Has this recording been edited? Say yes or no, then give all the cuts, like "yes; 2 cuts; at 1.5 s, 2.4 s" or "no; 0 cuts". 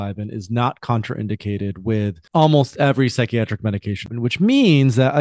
yes; 2 cuts; at 2.2 s, 4.0 s